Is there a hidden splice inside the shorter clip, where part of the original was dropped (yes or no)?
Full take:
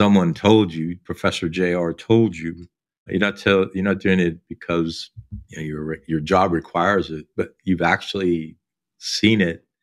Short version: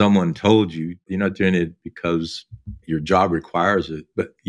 yes